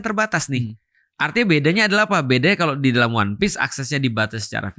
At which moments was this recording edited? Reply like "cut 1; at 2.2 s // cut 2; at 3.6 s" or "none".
none